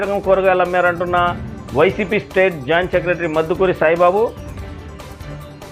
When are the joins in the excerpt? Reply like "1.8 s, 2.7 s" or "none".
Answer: none